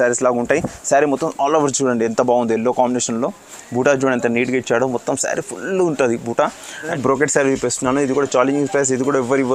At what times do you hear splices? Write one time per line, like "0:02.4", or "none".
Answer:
0:06.9